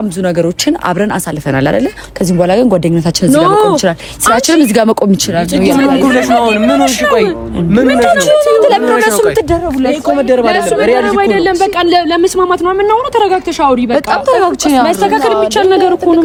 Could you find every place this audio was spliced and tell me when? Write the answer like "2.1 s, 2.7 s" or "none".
none